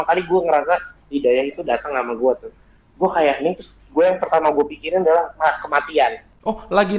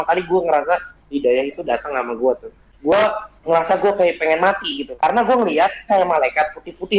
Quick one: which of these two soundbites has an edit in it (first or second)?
second